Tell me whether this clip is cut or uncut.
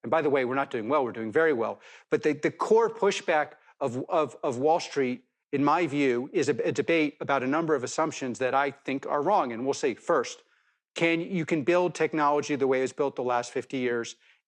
uncut